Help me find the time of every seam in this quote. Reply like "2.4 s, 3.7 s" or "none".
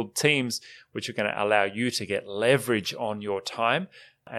none